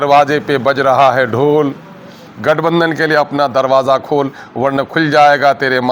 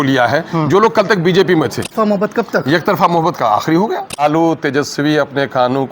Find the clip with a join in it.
second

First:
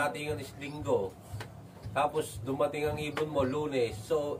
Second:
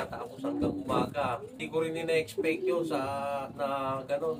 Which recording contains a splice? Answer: second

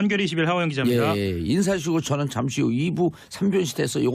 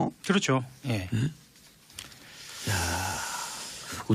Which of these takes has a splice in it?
second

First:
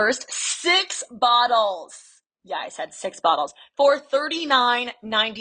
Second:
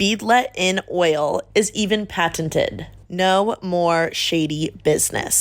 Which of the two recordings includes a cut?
second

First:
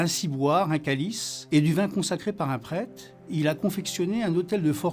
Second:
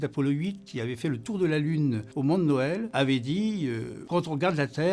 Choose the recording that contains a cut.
second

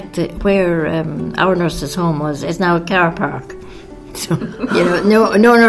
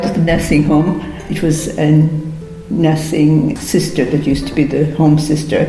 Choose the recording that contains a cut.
second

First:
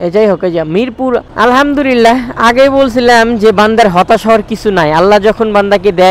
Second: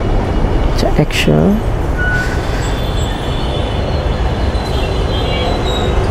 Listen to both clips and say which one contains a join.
first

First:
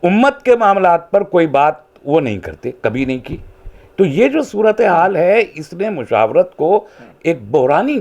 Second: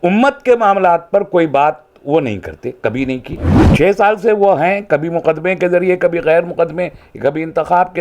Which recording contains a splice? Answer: second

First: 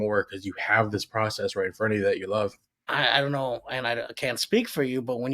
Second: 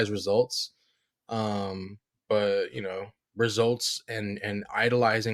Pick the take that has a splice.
first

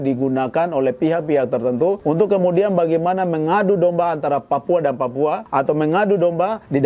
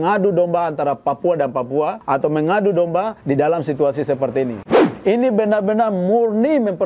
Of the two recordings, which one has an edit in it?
second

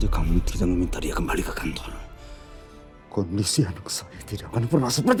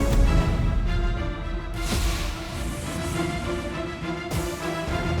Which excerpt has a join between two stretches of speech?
second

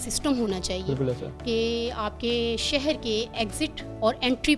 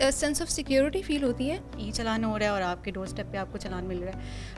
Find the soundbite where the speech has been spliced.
second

